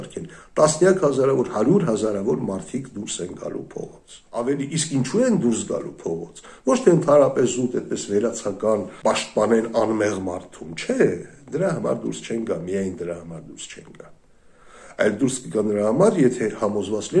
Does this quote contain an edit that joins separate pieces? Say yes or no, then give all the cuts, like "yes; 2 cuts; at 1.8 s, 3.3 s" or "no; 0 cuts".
yes; 2 cuts; at 4.4 s, 8.9 s